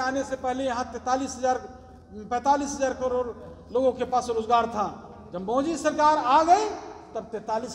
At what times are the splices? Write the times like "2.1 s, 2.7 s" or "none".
none